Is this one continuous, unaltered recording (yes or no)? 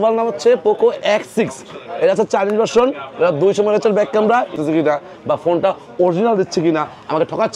no